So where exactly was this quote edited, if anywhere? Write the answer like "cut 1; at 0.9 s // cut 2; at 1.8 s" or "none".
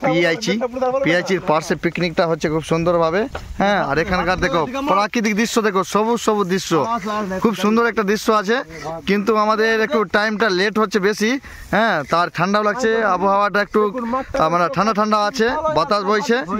none